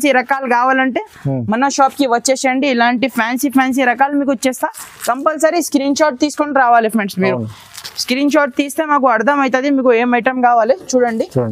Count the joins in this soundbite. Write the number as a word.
zero